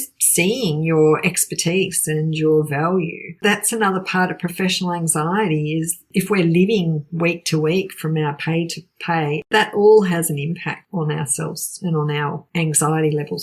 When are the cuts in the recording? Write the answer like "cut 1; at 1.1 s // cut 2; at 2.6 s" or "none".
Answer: cut 1; at 3.4 s // cut 2; at 6.0 s // cut 3; at 9.5 s // cut 4; at 10.8 s // cut 5; at 12.4 s